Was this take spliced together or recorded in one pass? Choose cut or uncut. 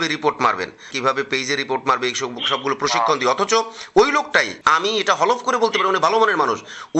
cut